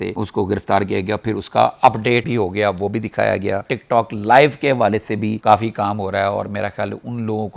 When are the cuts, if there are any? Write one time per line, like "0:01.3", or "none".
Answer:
none